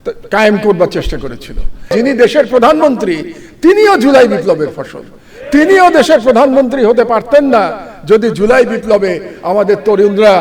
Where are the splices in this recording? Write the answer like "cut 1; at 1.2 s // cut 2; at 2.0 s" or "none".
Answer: cut 1; at 1.9 s